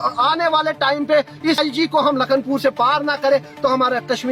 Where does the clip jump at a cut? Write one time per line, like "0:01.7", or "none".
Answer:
0:01.6